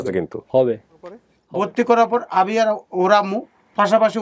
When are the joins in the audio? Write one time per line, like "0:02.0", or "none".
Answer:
0:01.3